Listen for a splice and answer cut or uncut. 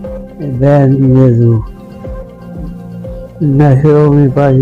cut